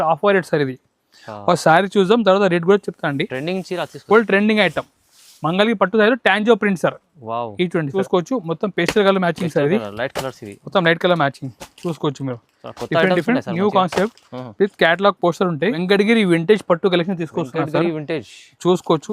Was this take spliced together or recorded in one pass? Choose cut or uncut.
cut